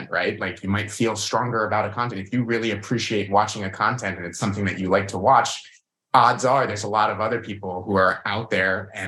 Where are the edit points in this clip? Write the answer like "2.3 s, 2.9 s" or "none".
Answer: none